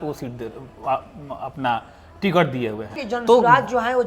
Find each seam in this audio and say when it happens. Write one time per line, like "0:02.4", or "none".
0:03.0

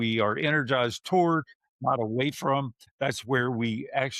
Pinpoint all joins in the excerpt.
0:02.8

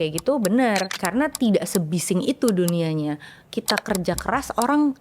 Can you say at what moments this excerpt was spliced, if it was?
0:00.9

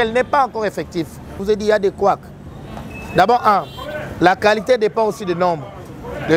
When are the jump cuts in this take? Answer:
0:01.4

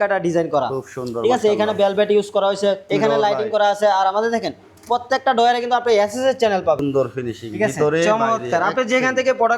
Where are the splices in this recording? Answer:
0:02.8
0:06.8

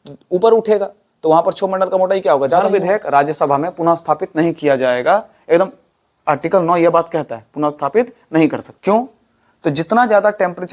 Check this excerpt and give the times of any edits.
0:02.7
0:08.7

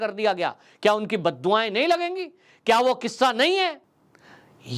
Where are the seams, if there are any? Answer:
0:03.9

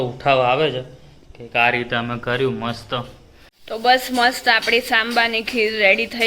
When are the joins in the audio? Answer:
0:03.6

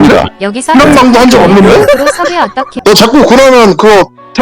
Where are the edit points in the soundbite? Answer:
0:02.8

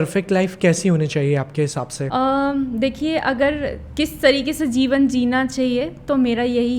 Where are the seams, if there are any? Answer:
none

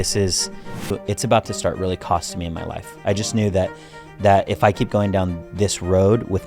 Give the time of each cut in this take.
0:00.9

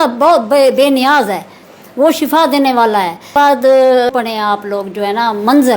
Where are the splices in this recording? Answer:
0:03.3
0:04.1

